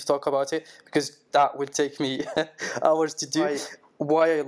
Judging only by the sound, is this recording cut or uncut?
cut